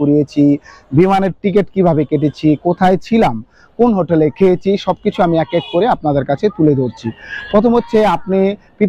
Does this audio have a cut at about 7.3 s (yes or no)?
no